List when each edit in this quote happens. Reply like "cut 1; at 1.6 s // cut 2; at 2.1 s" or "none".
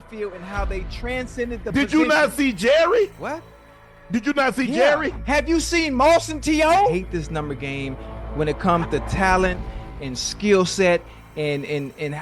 cut 1; at 6.9 s